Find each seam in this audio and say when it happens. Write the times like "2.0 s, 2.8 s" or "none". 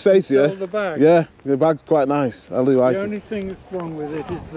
none